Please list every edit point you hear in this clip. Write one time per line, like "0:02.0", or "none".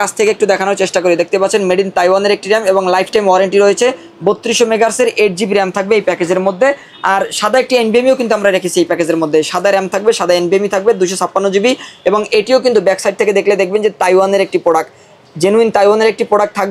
none